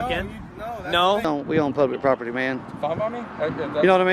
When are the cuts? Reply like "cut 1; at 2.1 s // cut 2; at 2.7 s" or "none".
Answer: cut 1; at 1.3 s